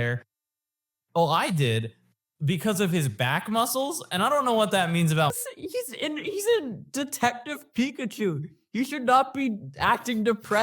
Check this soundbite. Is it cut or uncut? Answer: cut